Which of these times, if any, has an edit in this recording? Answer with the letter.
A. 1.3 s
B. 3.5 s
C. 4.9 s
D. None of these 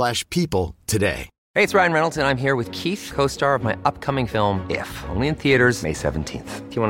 A